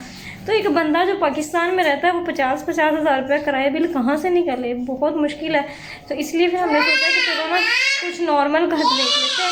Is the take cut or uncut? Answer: uncut